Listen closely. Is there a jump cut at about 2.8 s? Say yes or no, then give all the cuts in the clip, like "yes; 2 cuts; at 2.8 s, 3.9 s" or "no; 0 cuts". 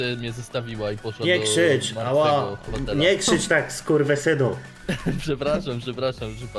yes; 1 cut; at 2.8 s